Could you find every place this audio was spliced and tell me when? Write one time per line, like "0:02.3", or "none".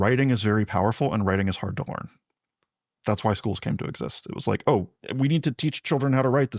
0:05.0